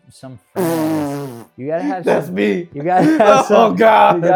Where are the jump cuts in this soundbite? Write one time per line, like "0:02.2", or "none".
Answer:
none